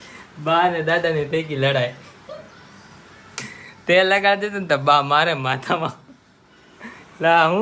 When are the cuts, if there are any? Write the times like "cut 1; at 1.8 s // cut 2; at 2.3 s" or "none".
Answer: none

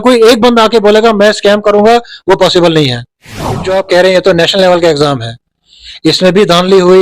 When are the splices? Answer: cut 1; at 3.5 s

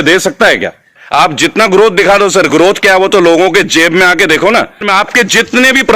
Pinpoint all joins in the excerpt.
cut 1; at 1.0 s // cut 2; at 4.9 s

